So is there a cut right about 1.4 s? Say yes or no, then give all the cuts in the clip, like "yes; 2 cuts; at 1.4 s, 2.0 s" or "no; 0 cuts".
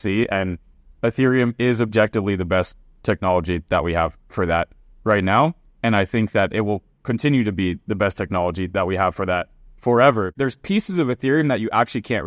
no; 1 cut; at 10.3 s